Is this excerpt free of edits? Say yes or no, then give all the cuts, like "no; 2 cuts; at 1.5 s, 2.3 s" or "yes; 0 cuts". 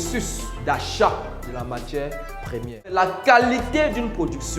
no; 1 cut; at 2.9 s